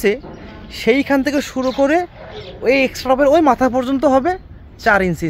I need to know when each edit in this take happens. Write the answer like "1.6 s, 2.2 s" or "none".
none